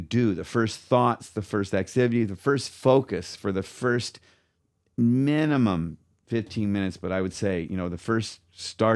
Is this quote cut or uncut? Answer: uncut